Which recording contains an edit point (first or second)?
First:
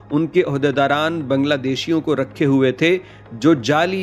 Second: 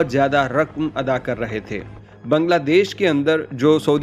second